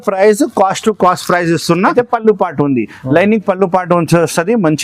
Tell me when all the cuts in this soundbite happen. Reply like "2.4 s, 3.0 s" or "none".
1.9 s